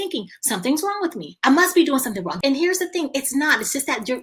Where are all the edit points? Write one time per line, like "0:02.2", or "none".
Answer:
0:01.3
0:02.3